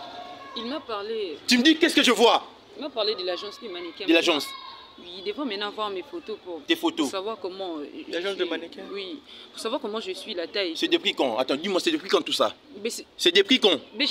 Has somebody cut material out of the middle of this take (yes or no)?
no